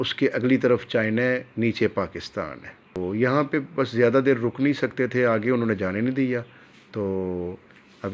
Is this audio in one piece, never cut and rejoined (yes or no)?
yes